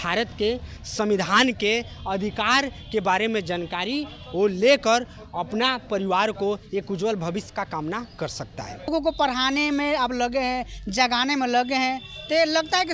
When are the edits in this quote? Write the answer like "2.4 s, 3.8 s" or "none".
8.9 s